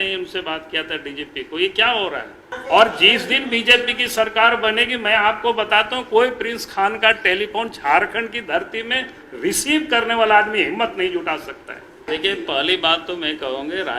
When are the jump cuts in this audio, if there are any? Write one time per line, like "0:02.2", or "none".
0:02.5
0:12.0